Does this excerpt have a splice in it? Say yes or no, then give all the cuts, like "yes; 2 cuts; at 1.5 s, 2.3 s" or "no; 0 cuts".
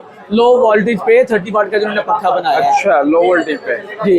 no; 0 cuts